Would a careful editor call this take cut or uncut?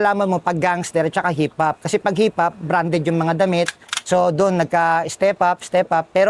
cut